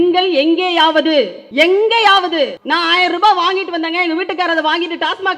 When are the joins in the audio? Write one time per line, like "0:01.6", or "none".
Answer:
0:01.4
0:02.6